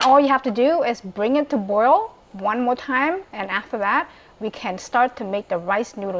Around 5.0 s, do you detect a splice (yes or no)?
no